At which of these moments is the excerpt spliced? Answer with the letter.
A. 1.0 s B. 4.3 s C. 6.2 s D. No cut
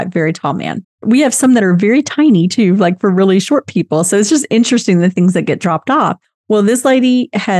A